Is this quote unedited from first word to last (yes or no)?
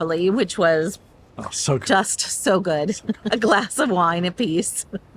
yes